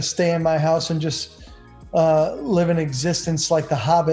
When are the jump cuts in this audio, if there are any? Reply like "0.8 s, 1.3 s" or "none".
none